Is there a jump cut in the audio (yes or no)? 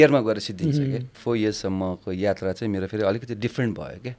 yes